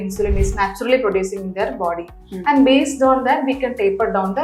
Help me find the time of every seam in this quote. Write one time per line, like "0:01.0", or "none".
none